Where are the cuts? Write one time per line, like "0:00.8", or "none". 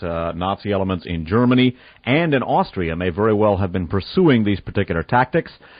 0:01.2